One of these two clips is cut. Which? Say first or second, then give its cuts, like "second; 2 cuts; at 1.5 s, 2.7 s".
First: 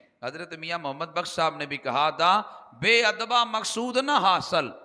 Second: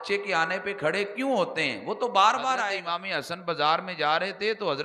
second; 1 cut; at 2.7 s